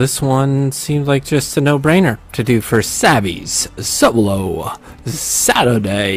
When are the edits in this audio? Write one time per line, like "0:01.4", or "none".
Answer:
0:04.7

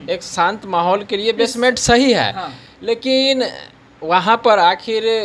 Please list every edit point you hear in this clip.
none

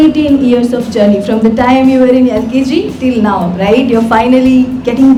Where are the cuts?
none

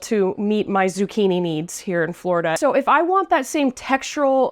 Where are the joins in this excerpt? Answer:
0:02.6

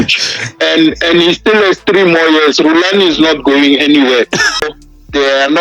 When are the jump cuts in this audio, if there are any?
0:04.6

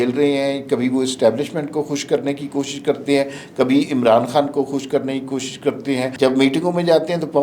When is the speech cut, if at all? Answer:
0:06.1

